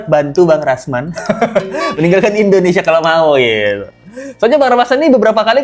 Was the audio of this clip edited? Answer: no; 0 cuts

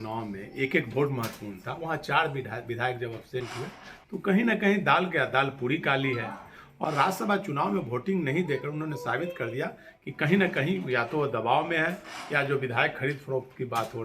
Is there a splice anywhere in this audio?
yes; 1 cut; at 6.7 s

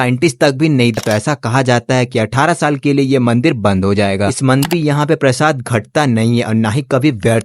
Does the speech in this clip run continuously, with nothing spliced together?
no; 2 cuts; at 1.0 s, 4.7 s

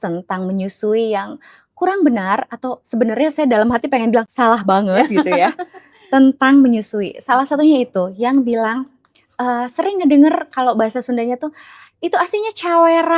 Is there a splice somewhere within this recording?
no; 0 cuts

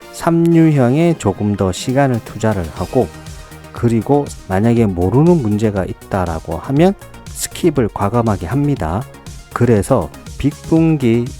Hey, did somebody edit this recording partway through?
yes; 1 cut; at 10.2 s

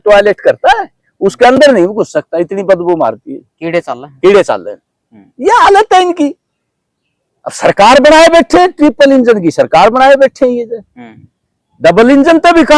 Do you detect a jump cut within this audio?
no; 0 cuts

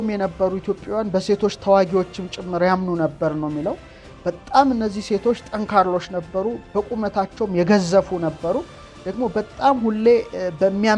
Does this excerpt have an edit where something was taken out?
no; 0 cuts

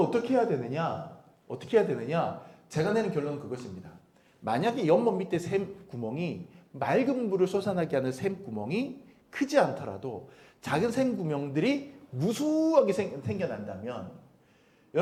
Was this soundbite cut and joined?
no; 0 cuts

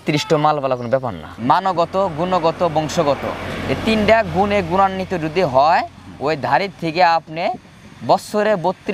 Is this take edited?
yes; 1 cut; at 1.2 s

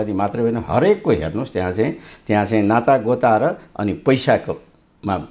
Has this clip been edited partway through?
no; 0 cuts

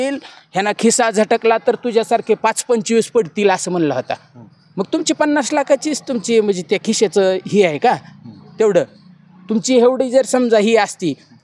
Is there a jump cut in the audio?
no; 0 cuts

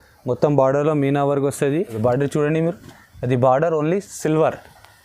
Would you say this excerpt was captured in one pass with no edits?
no; 1 cut; at 2.0 s

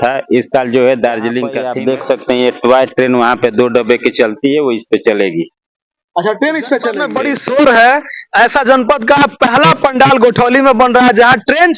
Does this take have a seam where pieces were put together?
yes; 2 cuts; at 1.6 s, 7.1 s

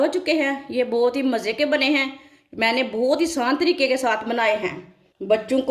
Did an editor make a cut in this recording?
no; 0 cuts

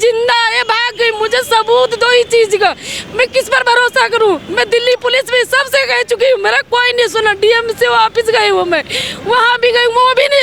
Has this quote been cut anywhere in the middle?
no; 0 cuts

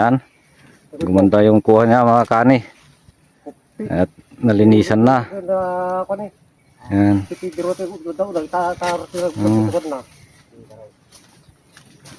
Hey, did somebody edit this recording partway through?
no; 0 cuts

